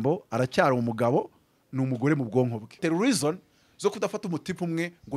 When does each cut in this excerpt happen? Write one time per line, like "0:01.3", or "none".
0:02.8